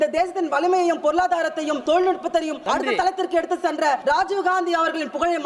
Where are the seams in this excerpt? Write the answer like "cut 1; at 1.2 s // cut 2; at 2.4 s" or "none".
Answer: cut 1; at 1.8 s // cut 2; at 2.6 s // cut 3; at 4.0 s